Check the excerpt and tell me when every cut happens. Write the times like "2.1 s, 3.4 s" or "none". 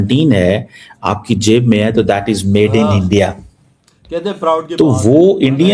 none